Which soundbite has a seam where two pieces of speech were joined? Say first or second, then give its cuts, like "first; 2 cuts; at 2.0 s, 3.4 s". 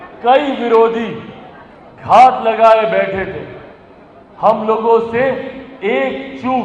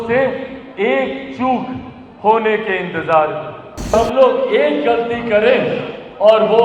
second; 1 cut; at 3.9 s